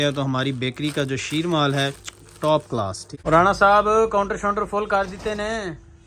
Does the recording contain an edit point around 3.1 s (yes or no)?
yes